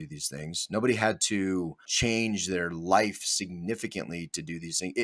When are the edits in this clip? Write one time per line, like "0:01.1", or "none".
0:01.9